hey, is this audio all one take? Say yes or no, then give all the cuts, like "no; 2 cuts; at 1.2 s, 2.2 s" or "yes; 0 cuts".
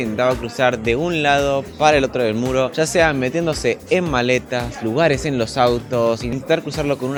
yes; 0 cuts